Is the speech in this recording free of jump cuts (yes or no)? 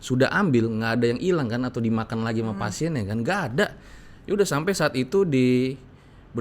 yes